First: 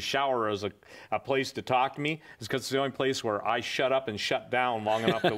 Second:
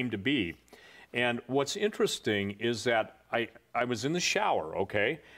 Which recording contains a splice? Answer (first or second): second